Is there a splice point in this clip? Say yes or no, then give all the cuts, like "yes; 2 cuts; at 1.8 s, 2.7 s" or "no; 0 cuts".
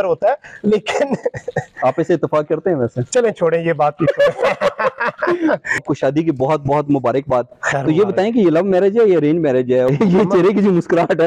yes; 2 cuts; at 5.8 s, 9.9 s